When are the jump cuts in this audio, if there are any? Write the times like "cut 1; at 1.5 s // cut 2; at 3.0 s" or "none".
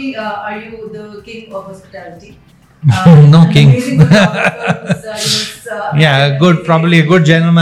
none